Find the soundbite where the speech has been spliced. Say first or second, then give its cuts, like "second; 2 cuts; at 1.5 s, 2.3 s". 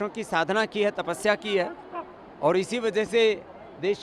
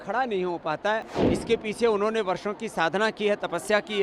second; 1 cut; at 1.1 s